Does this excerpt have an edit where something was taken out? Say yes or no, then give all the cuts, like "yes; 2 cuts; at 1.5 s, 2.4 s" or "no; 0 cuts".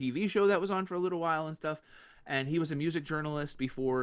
no; 0 cuts